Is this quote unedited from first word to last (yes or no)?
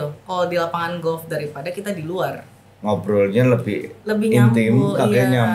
yes